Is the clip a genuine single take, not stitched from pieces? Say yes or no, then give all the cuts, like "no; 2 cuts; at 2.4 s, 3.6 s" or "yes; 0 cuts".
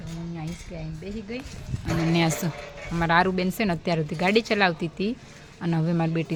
yes; 0 cuts